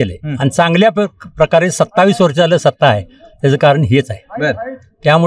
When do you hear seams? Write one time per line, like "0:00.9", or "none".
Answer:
none

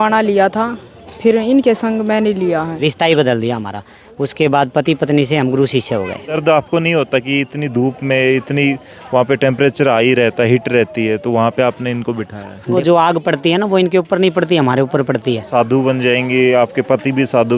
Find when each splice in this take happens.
0:02.8
0:06.4
0:12.7
0:15.4

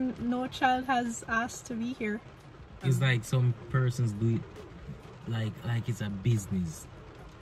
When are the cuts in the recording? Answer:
0:02.8

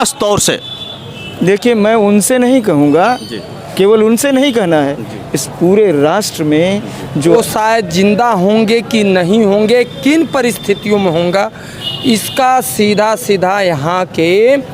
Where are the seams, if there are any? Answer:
0:07.3

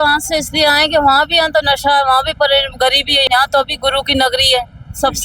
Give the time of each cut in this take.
0:03.3

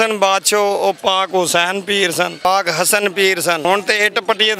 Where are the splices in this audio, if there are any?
0:02.4
0:03.6

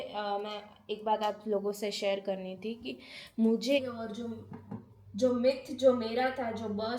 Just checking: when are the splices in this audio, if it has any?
0:03.8

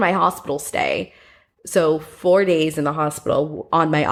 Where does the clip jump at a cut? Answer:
none

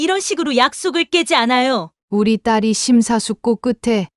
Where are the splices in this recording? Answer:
0:01.9

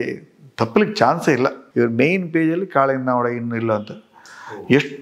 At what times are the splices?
0:01.6

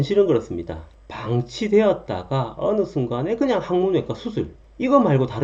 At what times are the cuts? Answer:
none

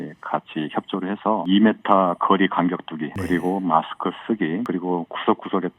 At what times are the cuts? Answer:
0:01.5
0:03.1
0:04.7

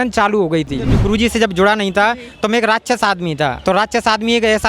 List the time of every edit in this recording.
0:00.9
0:03.6

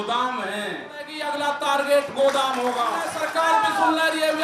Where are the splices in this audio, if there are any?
0:01.2
0:03.2

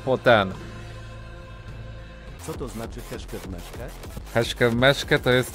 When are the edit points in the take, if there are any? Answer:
0:02.4
0:04.2

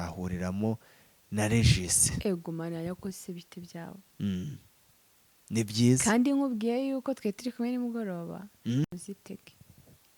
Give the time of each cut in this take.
none

